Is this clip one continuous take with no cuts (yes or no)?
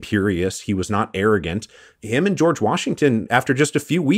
no